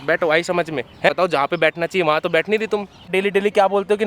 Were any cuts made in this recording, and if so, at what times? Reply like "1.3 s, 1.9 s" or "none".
1.1 s, 3.1 s